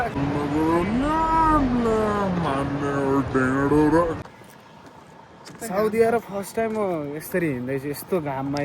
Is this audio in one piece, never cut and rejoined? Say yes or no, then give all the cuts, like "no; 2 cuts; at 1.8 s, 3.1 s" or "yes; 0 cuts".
no; 1 cut; at 4.2 s